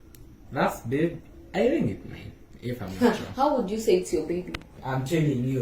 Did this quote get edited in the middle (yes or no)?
yes